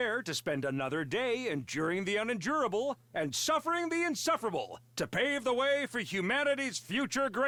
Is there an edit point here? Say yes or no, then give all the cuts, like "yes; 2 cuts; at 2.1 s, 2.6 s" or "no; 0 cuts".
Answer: no; 0 cuts